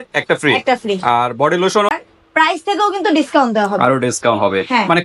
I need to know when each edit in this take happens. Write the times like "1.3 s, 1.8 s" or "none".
1.9 s